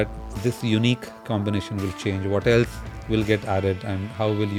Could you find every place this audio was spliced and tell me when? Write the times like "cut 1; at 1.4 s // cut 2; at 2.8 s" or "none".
none